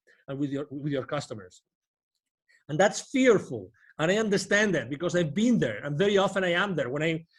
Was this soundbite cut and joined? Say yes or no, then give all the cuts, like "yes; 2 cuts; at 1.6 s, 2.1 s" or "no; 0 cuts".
no; 0 cuts